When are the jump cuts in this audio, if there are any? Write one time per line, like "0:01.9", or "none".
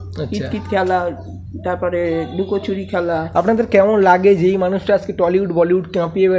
none